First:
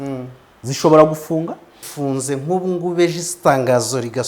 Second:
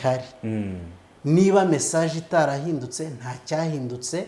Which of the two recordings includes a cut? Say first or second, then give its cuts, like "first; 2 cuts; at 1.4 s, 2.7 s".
first; 1 cut; at 1.8 s